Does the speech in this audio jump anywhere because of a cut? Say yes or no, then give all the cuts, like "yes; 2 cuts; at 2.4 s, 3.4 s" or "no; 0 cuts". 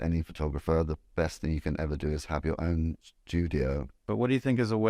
yes; 2 cuts; at 3.1 s, 4.1 s